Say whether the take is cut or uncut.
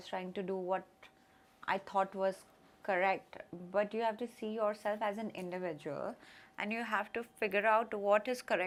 uncut